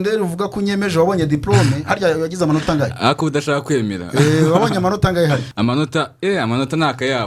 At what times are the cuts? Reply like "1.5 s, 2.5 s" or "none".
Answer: 5.5 s